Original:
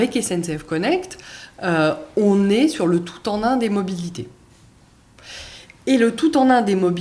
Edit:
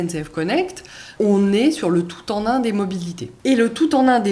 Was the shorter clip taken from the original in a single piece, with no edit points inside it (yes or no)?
no